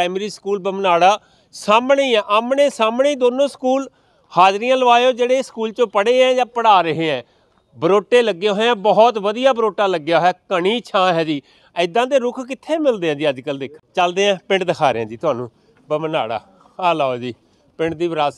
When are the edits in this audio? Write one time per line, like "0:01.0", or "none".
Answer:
0:13.7